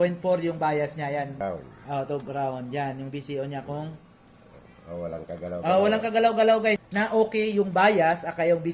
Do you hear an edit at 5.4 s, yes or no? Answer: no